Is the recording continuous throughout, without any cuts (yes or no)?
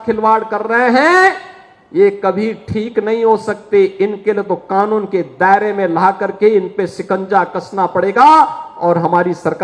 yes